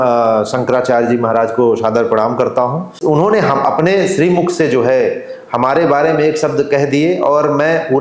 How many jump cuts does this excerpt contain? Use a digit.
1